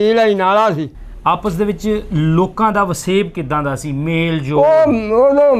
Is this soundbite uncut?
no; 1 cut; at 1.0 s

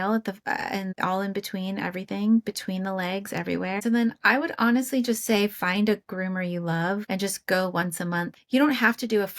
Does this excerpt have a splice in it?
yes; 2 cuts; at 3.8 s, 8.3 s

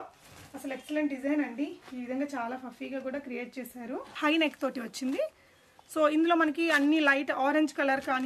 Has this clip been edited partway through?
yes; 1 cut; at 4.1 s

